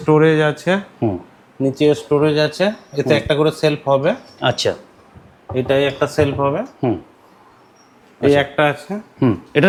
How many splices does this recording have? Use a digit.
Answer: 0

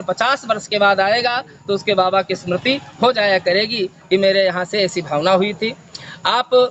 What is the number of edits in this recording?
0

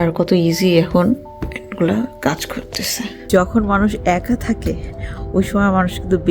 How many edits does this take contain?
1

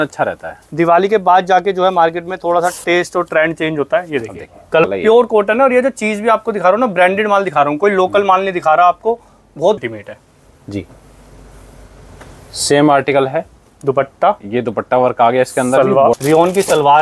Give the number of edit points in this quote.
3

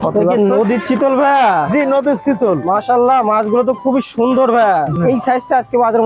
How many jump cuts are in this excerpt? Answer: 1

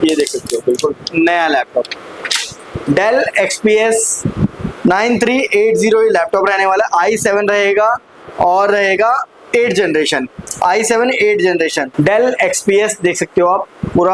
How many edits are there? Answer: 1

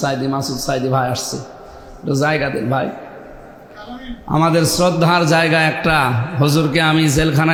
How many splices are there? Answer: 0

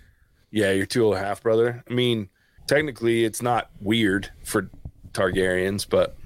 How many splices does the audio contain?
1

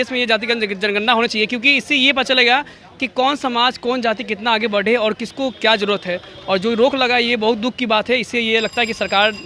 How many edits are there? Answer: 0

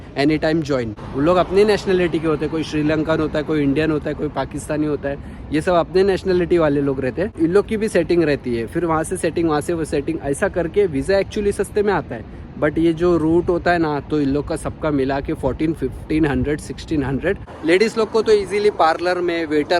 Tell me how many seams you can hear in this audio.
3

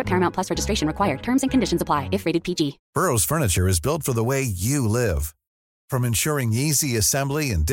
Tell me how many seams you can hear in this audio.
1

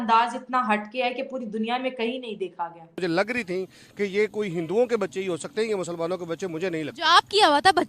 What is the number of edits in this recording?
1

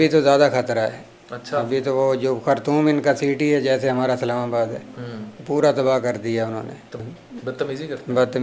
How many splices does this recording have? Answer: 1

